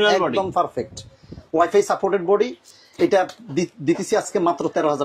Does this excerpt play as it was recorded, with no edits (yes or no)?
yes